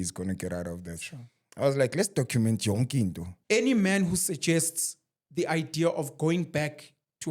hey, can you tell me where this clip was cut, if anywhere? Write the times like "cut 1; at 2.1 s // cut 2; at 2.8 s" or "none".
cut 1; at 3.3 s

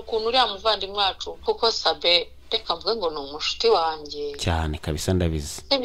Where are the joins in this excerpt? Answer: cut 1; at 1.4 s

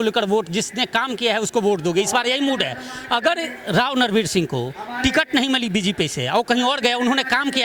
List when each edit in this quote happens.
none

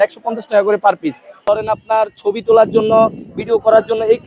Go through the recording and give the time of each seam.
cut 1; at 1.4 s

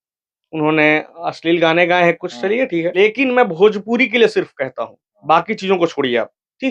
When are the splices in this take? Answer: cut 1; at 3.0 s

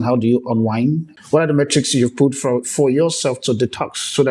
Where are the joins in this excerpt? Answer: cut 1; at 1.1 s

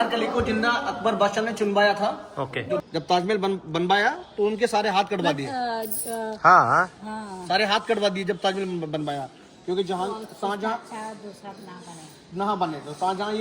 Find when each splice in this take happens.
cut 1; at 2.8 s

